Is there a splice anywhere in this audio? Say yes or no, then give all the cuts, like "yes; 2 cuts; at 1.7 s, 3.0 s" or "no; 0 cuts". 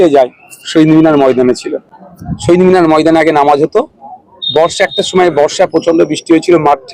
no; 0 cuts